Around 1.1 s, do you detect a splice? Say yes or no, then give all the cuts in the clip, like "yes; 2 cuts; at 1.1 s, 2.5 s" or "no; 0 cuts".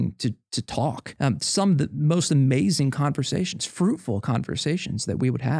yes; 1 cut; at 1.1 s